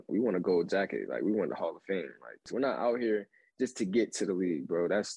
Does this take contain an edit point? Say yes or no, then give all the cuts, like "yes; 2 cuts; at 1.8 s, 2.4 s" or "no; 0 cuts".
yes; 1 cut; at 2.5 s